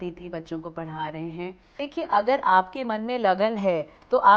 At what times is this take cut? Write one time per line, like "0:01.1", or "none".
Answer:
0:01.8